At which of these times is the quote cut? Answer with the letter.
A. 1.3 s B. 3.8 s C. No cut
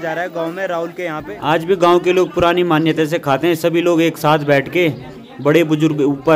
A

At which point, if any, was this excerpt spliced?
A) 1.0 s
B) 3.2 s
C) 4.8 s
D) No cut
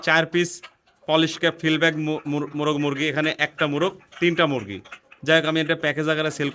D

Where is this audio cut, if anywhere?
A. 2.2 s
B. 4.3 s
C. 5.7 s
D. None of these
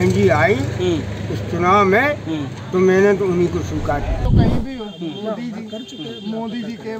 B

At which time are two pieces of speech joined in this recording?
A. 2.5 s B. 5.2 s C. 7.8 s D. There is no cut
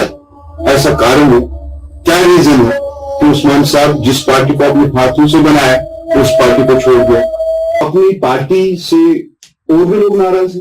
C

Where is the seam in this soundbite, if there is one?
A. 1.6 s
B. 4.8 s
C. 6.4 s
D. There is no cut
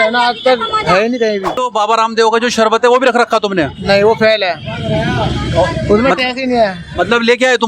A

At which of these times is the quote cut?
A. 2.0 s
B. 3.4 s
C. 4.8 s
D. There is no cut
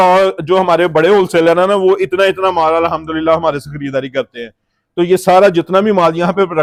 D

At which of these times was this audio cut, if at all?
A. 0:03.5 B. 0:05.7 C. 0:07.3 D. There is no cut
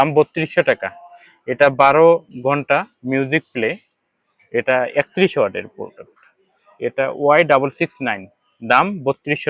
D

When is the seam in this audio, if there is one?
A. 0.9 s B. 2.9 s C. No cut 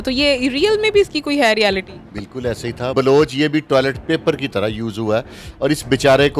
B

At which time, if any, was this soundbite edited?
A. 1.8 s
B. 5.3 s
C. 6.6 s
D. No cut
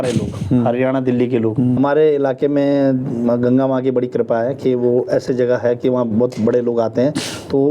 A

